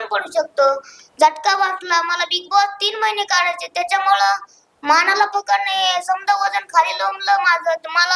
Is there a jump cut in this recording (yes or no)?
no